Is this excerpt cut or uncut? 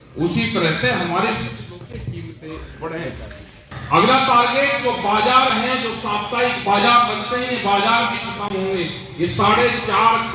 cut